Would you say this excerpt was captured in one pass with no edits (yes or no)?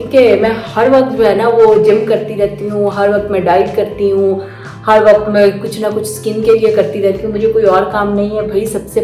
yes